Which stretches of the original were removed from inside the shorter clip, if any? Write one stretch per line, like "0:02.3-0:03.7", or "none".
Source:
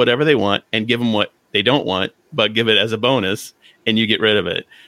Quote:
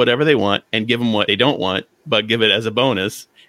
0:01.3-0:01.5